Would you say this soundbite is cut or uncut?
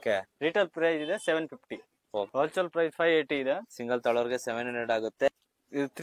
cut